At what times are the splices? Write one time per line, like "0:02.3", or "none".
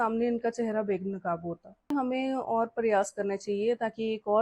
0:01.9